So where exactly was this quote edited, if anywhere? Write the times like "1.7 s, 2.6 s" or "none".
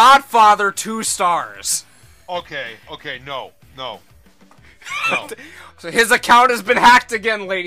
none

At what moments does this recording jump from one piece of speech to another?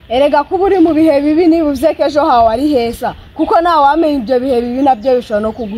none

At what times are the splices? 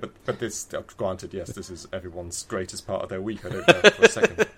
3.6 s

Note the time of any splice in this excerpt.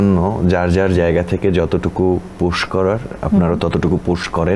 none

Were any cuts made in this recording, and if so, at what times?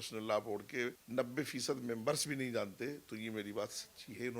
1.0 s

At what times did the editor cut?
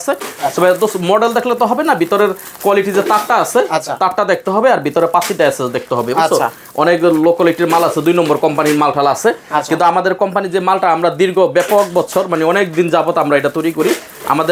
none

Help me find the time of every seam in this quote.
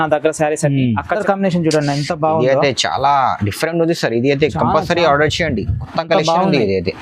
1.2 s

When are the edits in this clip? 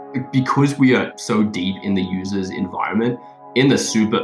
none

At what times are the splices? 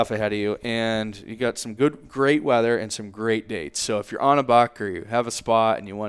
none

